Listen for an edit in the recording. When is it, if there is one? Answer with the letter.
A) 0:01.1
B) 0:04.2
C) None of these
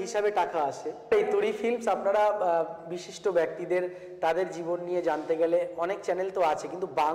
A